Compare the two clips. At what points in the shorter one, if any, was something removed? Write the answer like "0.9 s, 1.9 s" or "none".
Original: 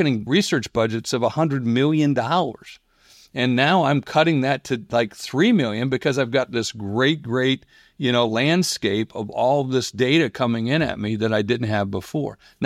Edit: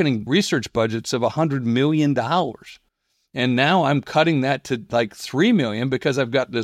none